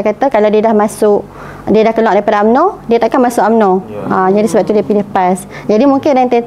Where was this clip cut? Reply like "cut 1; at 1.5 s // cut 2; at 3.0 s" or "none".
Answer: none